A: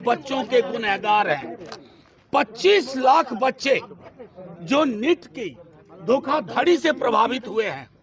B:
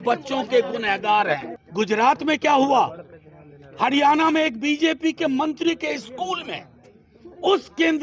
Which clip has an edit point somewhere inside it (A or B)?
B